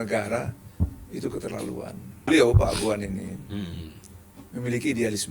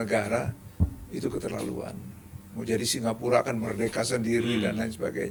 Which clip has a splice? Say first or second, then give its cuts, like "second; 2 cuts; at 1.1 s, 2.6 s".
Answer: first; 1 cut; at 2.3 s